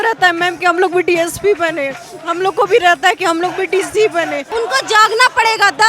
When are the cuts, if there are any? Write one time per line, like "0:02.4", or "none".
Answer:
0:04.5